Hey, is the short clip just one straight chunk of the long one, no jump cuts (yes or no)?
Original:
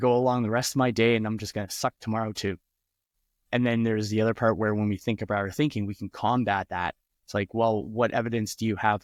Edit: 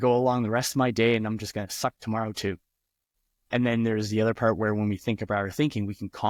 yes